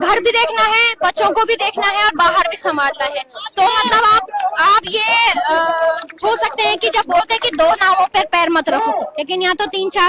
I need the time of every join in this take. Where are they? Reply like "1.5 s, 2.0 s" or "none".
none